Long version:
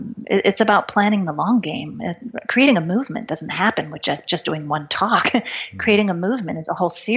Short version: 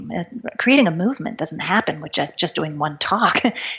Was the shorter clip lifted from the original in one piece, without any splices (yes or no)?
yes